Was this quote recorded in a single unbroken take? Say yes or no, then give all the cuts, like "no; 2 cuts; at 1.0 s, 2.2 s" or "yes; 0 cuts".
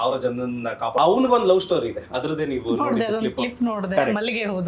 no; 1 cut; at 1.0 s